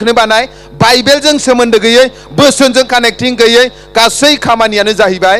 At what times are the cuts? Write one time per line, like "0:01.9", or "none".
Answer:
none